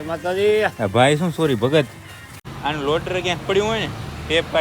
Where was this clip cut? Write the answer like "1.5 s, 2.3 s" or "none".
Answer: 2.0 s